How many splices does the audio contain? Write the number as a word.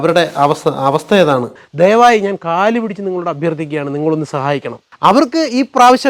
two